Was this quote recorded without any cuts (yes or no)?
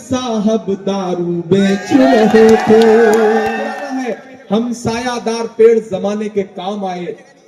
no